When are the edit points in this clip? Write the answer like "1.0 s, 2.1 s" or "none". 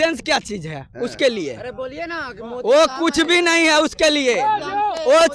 none